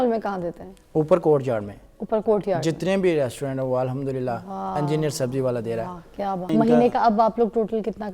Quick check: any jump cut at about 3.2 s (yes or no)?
no